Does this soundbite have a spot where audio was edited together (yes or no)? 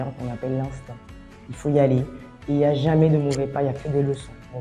no